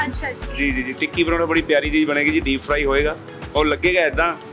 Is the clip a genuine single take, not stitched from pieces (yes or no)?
yes